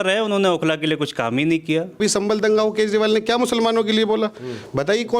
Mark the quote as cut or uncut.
cut